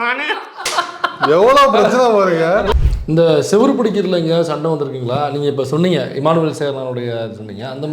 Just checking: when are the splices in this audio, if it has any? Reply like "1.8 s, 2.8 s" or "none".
2.7 s